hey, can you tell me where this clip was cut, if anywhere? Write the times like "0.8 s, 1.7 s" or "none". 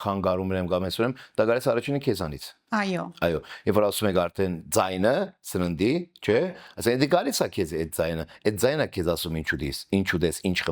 none